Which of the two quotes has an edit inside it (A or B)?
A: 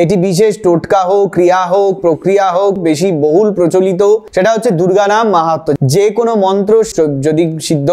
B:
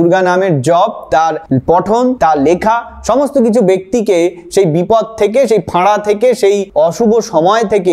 A